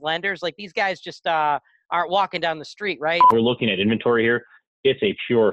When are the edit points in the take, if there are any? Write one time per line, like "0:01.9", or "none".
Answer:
0:03.3